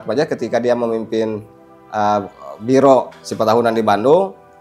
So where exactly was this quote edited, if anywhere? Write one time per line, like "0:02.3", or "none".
none